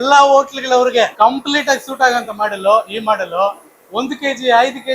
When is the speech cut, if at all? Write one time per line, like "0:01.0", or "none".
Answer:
0:01.1